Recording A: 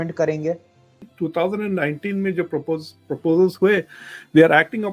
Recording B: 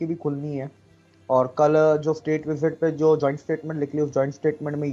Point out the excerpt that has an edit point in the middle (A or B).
A